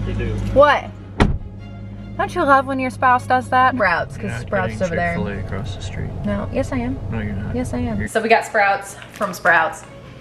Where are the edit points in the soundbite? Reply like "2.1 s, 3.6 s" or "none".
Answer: 3.8 s, 8.0 s